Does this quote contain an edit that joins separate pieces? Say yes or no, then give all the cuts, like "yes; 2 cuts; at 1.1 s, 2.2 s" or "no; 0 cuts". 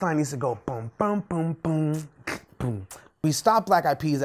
yes; 1 cut; at 3.2 s